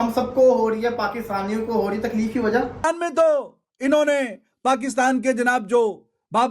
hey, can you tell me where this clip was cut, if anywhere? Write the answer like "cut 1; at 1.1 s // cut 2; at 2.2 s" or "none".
cut 1; at 2.8 s